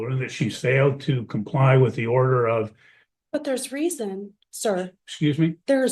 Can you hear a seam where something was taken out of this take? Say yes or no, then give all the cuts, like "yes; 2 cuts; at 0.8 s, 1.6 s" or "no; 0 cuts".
no; 0 cuts